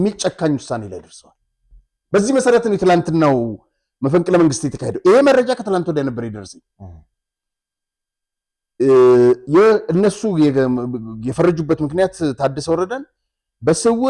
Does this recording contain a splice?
no; 0 cuts

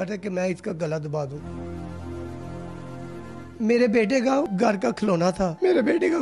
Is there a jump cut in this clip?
yes; 3 cuts; at 1.4 s, 3.5 s, 4.5 s

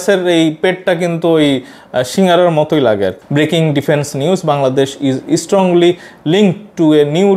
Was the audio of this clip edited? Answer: yes; 1 cut; at 3.2 s

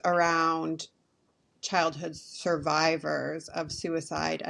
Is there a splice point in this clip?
no; 0 cuts

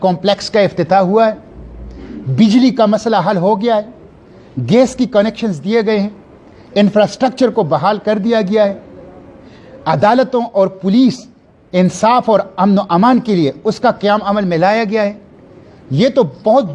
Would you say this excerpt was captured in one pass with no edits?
yes; 0 cuts

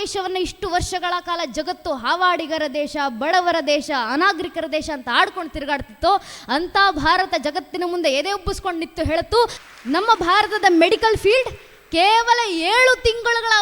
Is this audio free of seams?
no; 1 cut; at 9.6 s

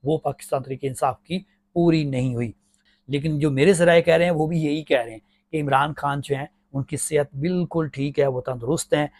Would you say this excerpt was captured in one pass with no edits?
yes; 0 cuts

